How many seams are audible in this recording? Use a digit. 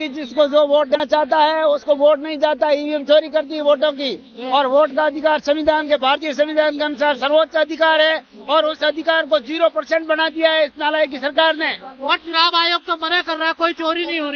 1